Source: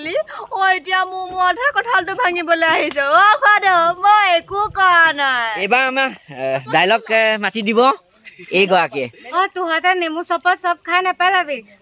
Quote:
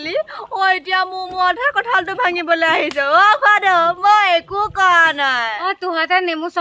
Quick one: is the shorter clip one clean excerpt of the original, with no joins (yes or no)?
no